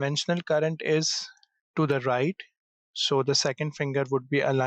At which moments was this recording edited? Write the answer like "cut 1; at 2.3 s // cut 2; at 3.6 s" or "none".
none